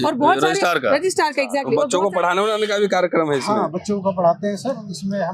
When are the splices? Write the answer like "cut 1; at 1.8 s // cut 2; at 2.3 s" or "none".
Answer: cut 1; at 1.9 s